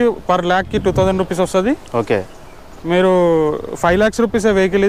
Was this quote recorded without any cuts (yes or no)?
yes